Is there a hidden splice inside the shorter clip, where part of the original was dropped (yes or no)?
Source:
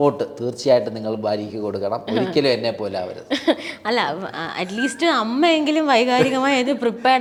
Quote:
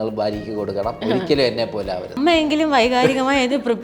yes